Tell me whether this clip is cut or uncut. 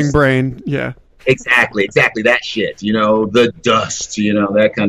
uncut